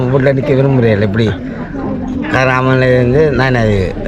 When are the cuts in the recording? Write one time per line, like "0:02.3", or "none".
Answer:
none